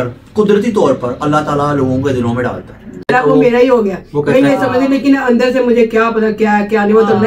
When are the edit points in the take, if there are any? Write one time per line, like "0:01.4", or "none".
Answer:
0:03.1

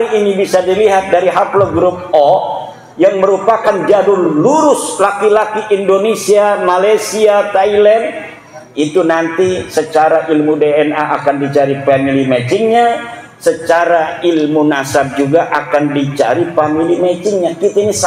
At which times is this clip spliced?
none

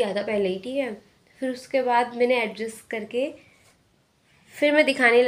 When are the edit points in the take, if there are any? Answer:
none

